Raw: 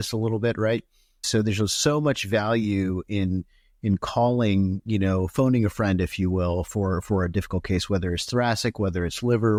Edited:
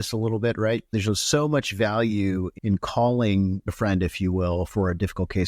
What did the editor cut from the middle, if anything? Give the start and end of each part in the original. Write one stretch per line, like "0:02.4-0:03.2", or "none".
0:00.9-0:01.4
0:03.0-0:03.7
0:04.9-0:05.7
0:06.7-0:07.0